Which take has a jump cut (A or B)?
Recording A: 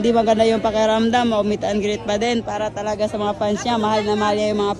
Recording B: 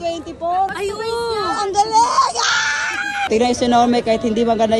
B